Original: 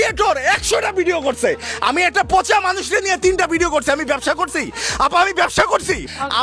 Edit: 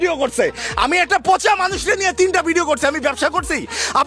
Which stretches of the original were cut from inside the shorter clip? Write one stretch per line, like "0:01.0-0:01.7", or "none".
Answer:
none